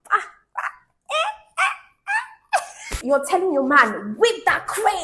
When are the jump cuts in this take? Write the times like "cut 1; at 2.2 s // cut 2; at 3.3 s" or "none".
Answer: cut 1; at 2.9 s

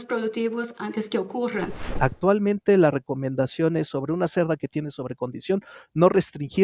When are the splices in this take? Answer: cut 1; at 1.9 s

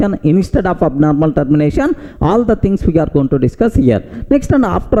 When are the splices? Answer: none

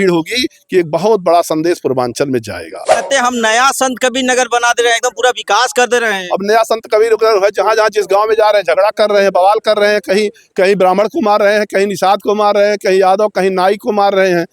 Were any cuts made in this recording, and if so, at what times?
cut 1; at 3.0 s

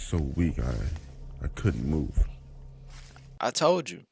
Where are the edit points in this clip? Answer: none

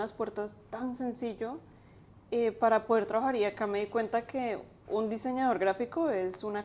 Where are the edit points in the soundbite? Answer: none

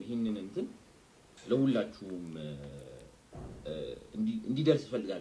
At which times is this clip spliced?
none

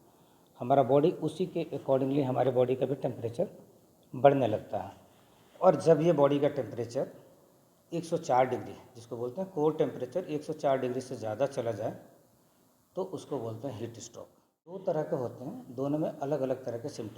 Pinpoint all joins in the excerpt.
cut 1; at 14.8 s

